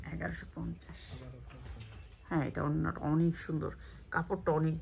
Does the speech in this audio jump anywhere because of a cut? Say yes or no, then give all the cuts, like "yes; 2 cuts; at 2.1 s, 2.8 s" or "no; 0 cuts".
no; 0 cuts